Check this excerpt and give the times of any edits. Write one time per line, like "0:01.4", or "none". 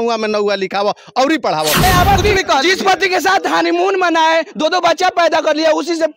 0:01.8